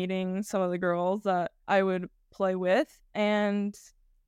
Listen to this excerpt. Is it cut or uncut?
cut